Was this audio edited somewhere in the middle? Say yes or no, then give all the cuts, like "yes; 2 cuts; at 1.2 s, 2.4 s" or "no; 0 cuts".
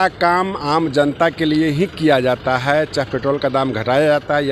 no; 0 cuts